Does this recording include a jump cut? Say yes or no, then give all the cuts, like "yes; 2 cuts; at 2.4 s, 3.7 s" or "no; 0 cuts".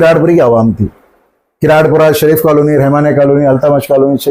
no; 0 cuts